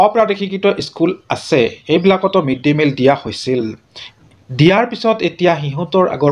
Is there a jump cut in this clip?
no; 0 cuts

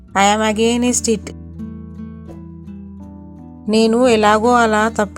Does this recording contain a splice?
yes; 2 cuts; at 1.6 s, 3.2 s

